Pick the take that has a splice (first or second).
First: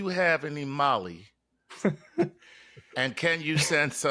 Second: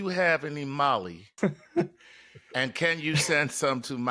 second